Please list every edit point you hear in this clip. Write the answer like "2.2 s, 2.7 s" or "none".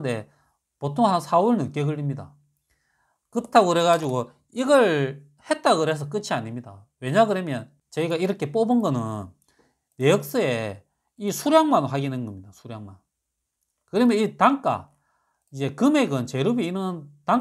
none